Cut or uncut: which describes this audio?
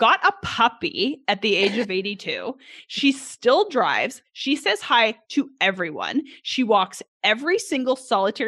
uncut